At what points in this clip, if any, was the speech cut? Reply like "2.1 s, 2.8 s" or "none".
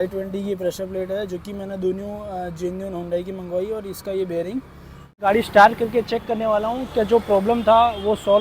5.2 s